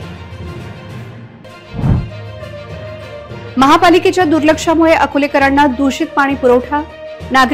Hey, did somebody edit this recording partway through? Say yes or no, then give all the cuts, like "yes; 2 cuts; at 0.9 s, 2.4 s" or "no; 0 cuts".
yes; 1 cut; at 1.0 s